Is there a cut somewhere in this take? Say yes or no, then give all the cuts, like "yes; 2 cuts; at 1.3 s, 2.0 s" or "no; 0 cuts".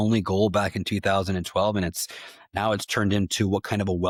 no; 0 cuts